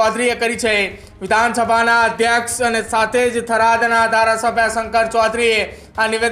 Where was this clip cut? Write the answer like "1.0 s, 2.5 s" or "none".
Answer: none